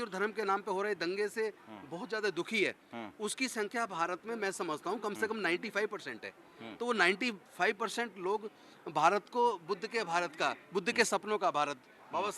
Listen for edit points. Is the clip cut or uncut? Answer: uncut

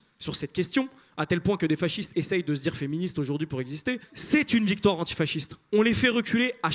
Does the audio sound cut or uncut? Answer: cut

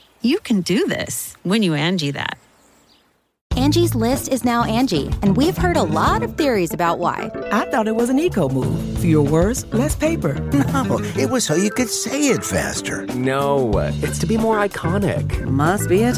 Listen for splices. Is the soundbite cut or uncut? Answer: cut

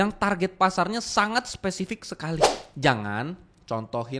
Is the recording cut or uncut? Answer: cut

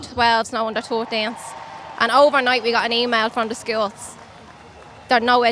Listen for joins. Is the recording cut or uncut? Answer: uncut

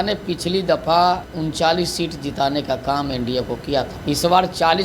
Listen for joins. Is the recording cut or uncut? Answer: cut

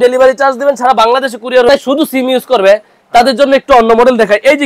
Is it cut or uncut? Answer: cut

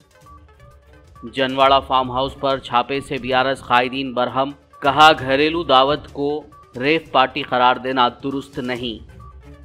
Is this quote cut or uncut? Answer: uncut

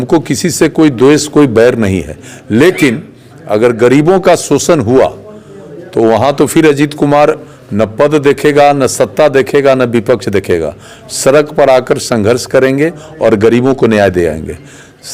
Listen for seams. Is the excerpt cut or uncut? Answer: uncut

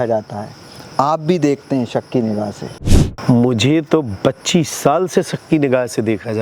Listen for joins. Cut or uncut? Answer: cut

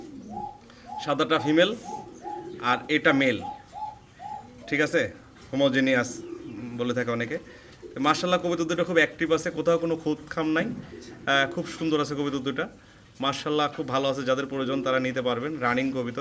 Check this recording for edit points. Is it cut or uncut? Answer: uncut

